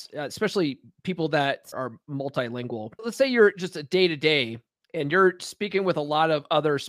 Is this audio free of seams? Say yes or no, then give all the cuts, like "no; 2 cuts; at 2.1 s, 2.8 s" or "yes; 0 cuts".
no; 2 cuts; at 1.7 s, 3.1 s